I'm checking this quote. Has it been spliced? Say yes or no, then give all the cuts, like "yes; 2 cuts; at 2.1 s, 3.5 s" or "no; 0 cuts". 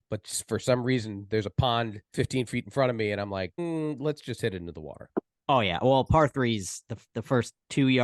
yes; 3 cuts; at 2.0 s, 3.5 s, 5.3 s